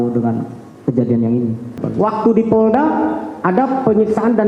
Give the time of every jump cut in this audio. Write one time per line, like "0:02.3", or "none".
0:01.8